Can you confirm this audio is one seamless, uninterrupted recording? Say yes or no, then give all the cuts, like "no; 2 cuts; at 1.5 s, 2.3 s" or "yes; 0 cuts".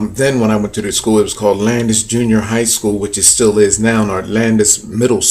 no; 1 cut; at 1.9 s